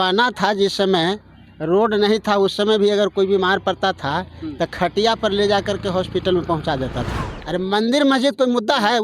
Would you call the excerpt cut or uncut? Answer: cut